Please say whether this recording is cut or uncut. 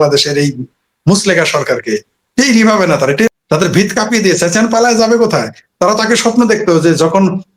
cut